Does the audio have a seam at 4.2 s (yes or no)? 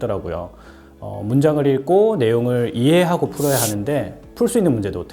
yes